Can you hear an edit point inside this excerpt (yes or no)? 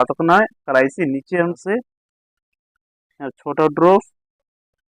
yes